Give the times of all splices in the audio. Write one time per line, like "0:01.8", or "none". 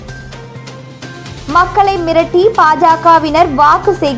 0:01.4